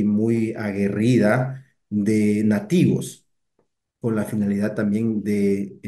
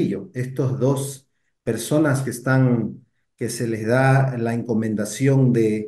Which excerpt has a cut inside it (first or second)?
second